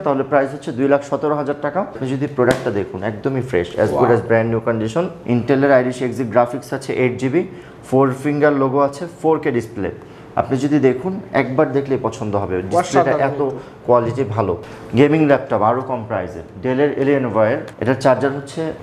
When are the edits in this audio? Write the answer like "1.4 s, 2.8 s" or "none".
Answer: 2.0 s, 5.1 s, 14.7 s

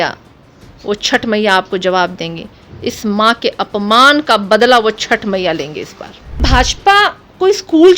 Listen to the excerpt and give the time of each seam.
6.4 s

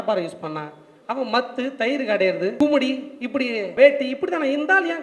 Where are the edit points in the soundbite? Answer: 2.5 s, 3.7 s

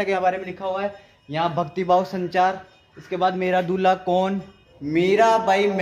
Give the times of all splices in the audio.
4.9 s

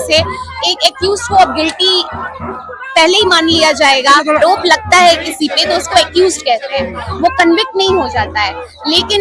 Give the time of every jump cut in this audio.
4.4 s

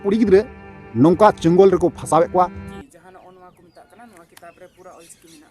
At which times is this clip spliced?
2.6 s

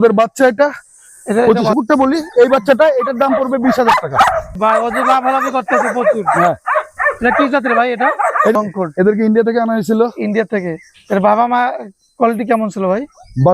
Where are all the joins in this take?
1.8 s, 4.5 s, 8.5 s

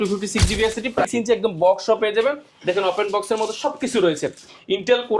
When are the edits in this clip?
1.1 s

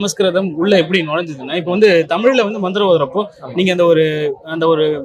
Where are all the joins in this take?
none

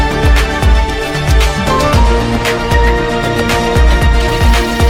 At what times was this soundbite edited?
none

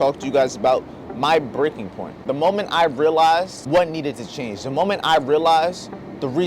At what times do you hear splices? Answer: 2.2 s, 3.6 s

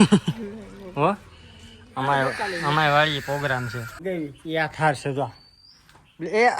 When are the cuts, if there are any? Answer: 4.0 s

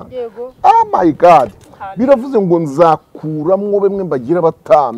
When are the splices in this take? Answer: none

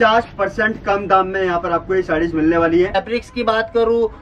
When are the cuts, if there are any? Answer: 2.9 s

